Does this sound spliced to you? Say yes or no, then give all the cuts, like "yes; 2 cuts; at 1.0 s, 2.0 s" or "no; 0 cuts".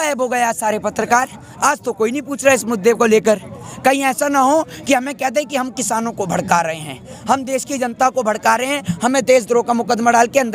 no; 0 cuts